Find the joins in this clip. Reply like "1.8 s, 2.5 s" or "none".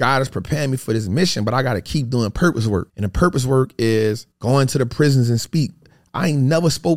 3.0 s, 4.3 s, 5.9 s